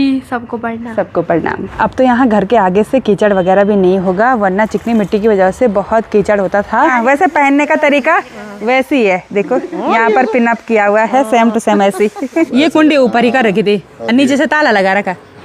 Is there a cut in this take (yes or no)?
yes